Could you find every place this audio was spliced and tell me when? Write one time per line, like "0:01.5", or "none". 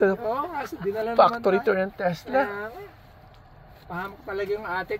none